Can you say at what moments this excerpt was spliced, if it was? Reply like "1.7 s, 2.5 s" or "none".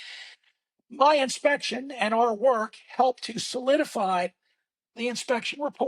none